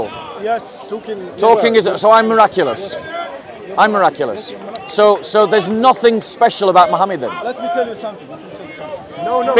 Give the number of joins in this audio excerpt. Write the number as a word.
zero